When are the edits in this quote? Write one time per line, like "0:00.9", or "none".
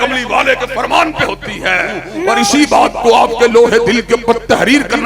0:02.1